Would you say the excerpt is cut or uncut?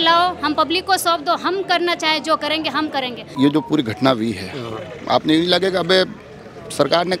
cut